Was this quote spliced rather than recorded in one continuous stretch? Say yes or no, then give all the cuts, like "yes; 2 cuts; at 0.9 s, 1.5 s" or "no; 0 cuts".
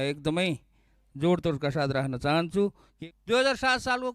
yes; 1 cut; at 2.9 s